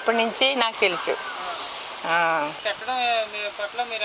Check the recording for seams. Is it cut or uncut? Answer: cut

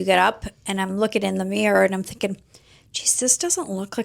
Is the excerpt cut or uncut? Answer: uncut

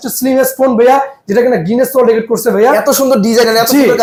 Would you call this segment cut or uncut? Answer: uncut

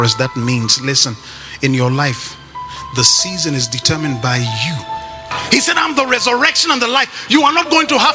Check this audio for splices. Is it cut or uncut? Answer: cut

